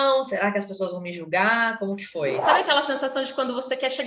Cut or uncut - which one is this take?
cut